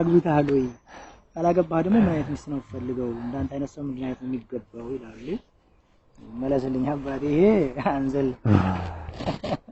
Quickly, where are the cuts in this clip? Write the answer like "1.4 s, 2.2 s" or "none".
none

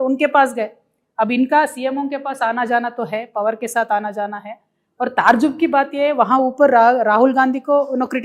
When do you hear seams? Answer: none

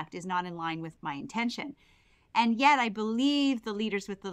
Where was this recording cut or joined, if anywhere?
2.0 s

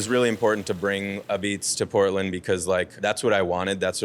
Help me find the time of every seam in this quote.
2.9 s

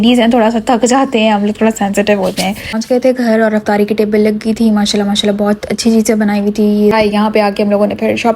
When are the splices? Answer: 2.7 s, 6.9 s

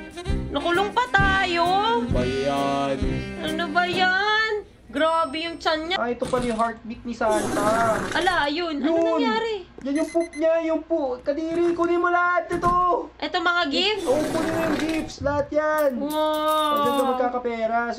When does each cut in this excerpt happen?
5.9 s

